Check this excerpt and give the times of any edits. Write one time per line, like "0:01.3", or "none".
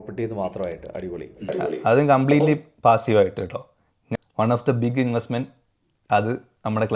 0:04.1